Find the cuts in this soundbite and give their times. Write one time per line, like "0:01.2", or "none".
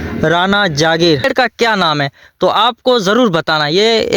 0:01.3